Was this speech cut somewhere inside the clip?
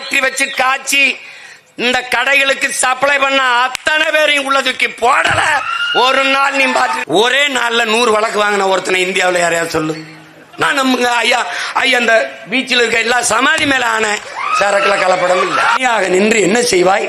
yes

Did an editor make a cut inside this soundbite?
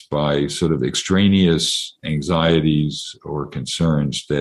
yes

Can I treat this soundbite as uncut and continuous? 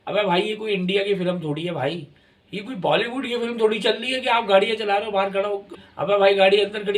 no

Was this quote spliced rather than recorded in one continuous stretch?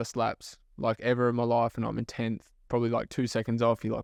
no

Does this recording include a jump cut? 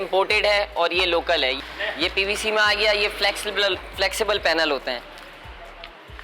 no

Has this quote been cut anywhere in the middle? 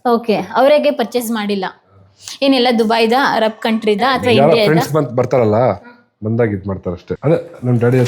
yes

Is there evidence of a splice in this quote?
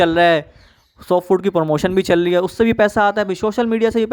no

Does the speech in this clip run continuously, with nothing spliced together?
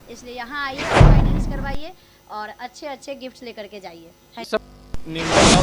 no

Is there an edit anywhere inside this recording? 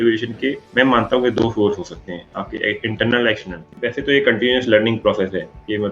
yes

